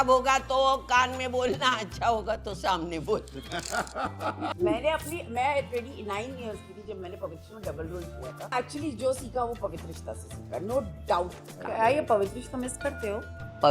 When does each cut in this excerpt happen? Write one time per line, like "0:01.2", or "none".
0:04.5
0:08.5
0:11.5